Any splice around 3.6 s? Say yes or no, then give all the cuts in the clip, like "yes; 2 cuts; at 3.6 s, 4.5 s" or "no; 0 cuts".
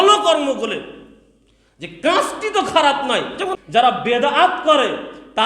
yes; 1 cut; at 3.6 s